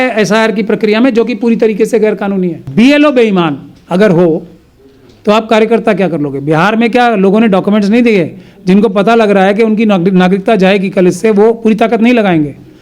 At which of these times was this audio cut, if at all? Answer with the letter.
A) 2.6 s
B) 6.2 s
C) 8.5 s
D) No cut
A